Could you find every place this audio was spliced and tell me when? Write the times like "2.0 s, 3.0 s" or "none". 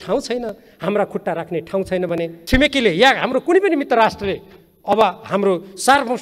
2.4 s